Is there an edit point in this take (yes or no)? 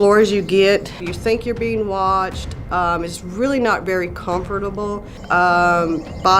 yes